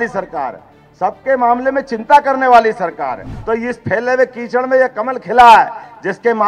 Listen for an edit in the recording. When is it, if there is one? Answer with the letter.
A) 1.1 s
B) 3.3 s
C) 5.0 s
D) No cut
B